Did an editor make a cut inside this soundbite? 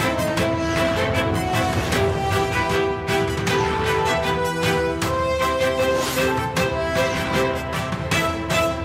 no; 0 cuts

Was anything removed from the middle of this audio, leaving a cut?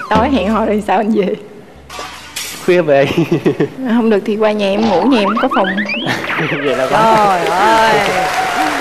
no; 0 cuts

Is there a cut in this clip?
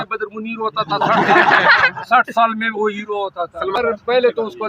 yes; 1 cut; at 3.8 s

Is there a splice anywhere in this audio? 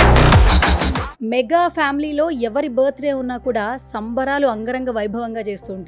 no; 0 cuts

